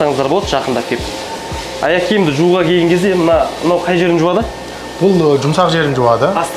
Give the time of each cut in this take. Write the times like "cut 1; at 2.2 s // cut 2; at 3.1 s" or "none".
none